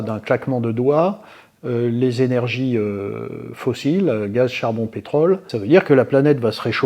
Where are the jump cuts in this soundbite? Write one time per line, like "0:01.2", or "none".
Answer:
0:05.5